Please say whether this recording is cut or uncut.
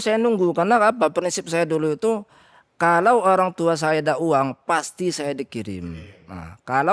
uncut